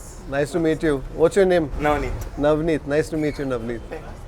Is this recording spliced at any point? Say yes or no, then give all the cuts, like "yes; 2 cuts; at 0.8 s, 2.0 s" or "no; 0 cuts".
no; 0 cuts